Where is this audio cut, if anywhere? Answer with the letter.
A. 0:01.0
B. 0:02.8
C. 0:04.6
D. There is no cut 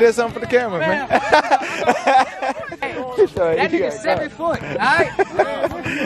B